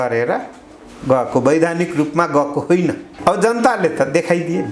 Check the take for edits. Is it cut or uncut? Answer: cut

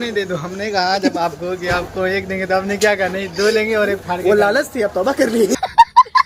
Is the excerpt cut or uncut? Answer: uncut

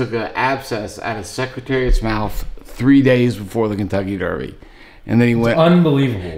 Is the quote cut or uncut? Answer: uncut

